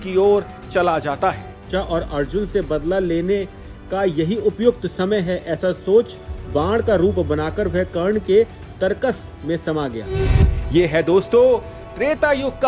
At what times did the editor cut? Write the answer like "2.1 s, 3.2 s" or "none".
1.6 s